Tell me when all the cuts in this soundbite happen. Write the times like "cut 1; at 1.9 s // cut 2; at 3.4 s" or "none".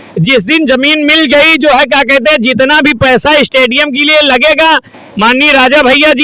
none